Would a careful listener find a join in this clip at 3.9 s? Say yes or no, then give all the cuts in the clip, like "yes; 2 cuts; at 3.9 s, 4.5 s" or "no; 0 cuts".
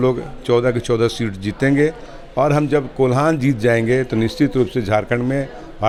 no; 0 cuts